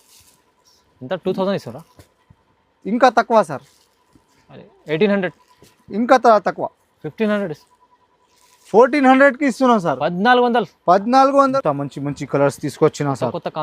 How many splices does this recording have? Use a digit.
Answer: 1